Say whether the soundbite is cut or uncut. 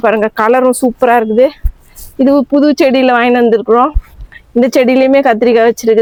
uncut